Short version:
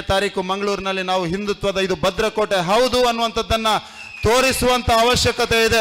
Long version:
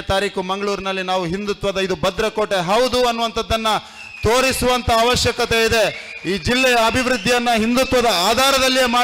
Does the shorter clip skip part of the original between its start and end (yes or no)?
no